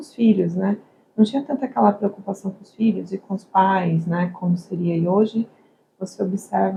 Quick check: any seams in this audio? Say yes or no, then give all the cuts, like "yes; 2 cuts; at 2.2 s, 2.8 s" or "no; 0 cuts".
no; 0 cuts